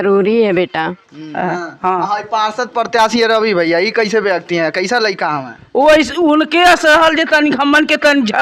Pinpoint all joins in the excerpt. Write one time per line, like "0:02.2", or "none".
0:01.3

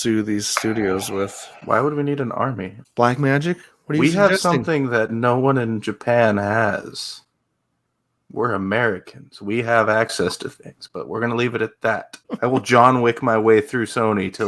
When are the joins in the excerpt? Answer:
0:02.7
0:12.2

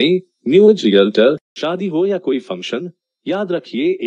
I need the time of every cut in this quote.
0:01.5

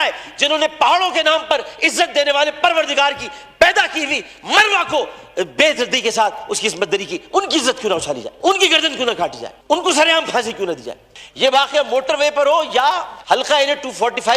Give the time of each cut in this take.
0:08.3
0:09.5
0:11.2

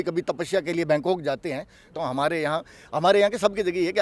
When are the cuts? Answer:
0:01.8

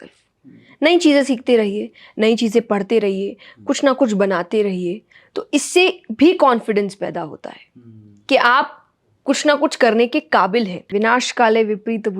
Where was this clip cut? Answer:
0:10.9

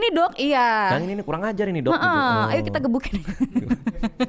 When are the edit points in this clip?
none

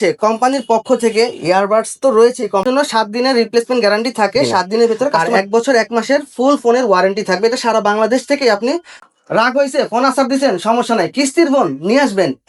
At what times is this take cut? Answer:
0:02.7
0:05.2
0:08.9

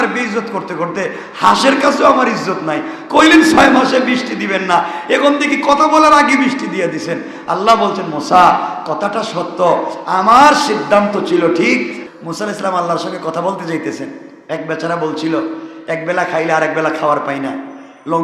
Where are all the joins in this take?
0:12.0

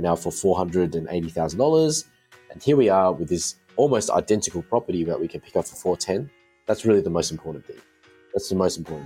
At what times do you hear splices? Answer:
none

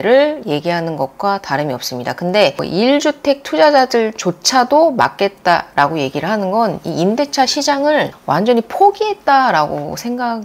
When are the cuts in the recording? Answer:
0:02.6

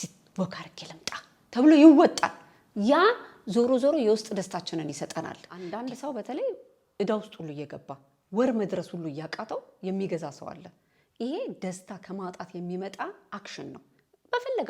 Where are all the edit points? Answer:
0:05.5

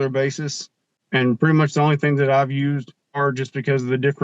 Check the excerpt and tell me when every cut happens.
0:00.9
0:03.1

